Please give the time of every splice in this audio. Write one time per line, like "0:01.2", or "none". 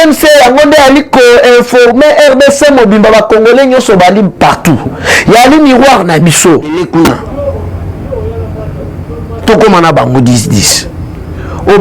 0:06.8

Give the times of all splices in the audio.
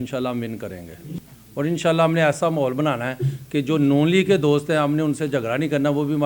0:01.1

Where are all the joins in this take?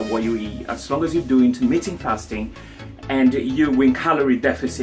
none

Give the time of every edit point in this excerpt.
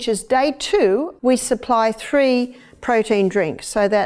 0:01.1

